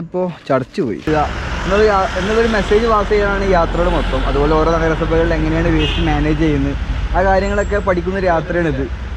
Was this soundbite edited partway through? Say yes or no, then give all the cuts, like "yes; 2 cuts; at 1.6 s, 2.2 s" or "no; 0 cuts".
yes; 1 cut; at 1.1 s